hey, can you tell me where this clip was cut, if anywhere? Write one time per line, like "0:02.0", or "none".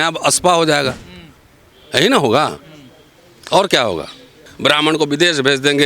0:04.5